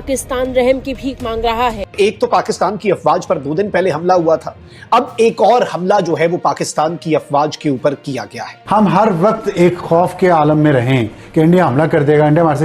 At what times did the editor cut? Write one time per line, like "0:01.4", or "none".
0:01.9
0:08.5